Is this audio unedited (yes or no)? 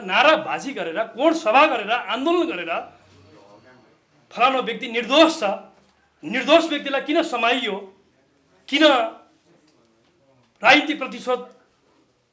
yes